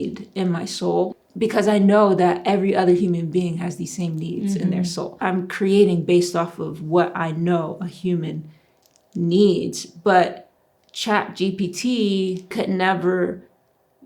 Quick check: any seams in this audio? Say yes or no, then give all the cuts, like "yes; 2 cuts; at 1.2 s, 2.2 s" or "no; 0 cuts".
yes; 3 cuts; at 1.1 s, 5.2 s, 12.5 s